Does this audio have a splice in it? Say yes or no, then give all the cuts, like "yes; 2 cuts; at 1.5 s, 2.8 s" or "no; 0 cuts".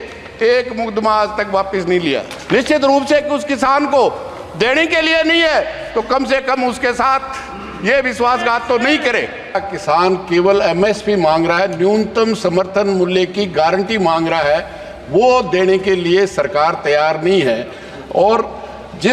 yes; 2 cuts; at 2.3 s, 9.7 s